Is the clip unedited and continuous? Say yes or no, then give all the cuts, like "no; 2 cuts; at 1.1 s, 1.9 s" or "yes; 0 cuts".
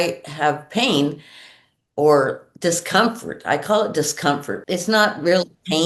no; 1 cut; at 4.5 s